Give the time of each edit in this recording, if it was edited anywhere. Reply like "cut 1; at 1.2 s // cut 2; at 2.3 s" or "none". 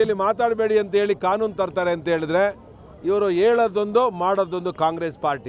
none